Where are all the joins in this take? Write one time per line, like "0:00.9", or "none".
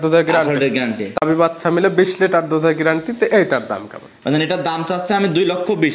0:01.2